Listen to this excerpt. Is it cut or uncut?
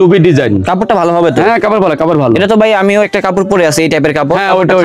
uncut